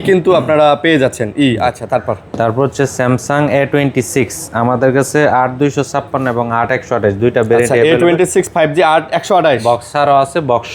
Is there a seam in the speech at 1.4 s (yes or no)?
no